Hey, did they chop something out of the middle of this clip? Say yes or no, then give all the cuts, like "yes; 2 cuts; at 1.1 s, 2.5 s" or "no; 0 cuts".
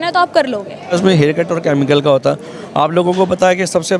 yes; 1 cut; at 0.9 s